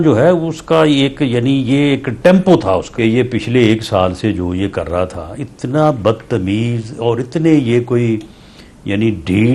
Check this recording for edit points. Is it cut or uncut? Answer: cut